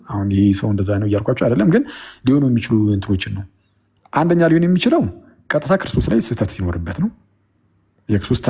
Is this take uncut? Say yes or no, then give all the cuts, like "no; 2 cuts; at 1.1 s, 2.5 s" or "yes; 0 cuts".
yes; 0 cuts